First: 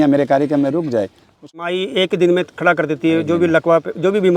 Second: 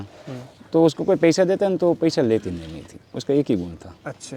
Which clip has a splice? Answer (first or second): first